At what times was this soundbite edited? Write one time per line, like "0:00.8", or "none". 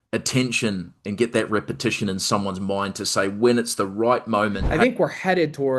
0:04.6